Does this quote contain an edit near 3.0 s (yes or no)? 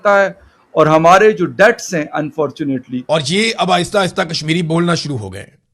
yes